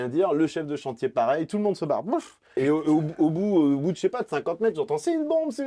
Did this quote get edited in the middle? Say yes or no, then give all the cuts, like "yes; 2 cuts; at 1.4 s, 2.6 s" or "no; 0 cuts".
yes; 1 cut; at 2.6 s